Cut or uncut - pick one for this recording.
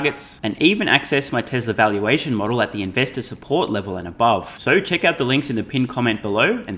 uncut